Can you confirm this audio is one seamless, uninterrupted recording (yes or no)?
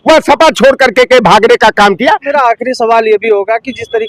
no